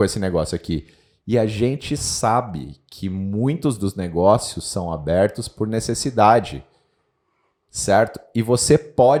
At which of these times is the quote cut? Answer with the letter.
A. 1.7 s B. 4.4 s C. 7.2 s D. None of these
D